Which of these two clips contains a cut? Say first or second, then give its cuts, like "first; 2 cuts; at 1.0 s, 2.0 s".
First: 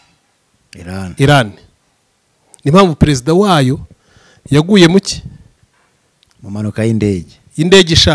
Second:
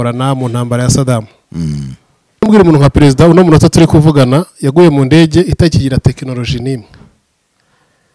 second; 1 cut; at 2.5 s